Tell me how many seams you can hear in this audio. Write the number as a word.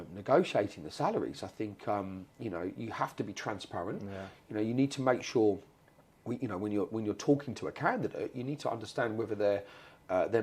zero